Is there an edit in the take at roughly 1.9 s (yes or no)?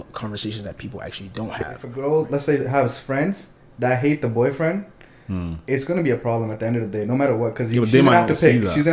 yes